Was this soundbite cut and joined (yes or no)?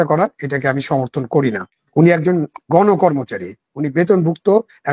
yes